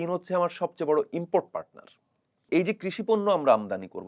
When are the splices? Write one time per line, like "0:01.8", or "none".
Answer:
0:02.5